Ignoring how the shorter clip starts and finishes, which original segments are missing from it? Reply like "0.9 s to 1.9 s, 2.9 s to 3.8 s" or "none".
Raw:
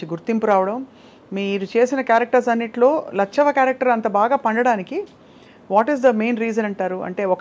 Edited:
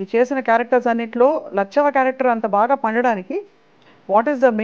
none